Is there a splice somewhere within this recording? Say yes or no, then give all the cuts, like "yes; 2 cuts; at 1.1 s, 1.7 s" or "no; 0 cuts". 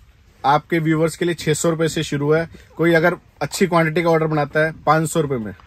no; 0 cuts